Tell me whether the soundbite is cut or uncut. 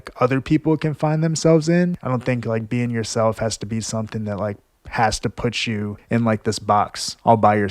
cut